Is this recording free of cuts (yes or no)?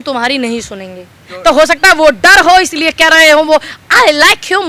no